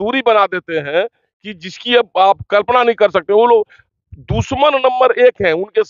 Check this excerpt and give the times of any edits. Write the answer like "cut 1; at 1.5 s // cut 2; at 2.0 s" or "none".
none